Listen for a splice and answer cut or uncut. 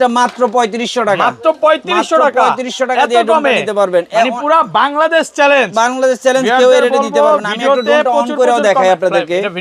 uncut